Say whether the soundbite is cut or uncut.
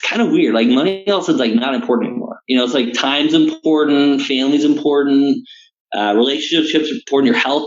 cut